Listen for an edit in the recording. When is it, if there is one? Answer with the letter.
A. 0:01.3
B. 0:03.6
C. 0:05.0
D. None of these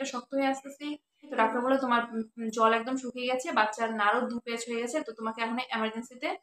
A